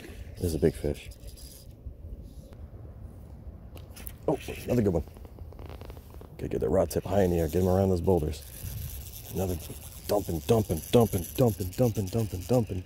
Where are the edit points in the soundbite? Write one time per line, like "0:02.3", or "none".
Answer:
0:02.5